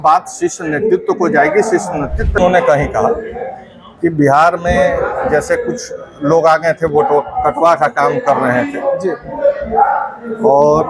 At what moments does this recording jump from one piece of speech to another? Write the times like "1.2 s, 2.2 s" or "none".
2.4 s